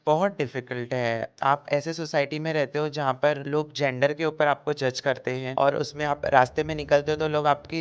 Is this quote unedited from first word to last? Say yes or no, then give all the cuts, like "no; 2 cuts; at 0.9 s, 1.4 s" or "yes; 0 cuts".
no; 3 cuts; at 1.3 s, 3.4 s, 5.4 s